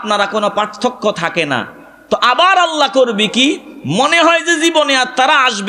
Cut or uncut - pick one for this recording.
uncut